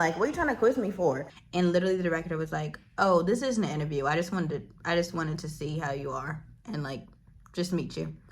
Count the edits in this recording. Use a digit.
1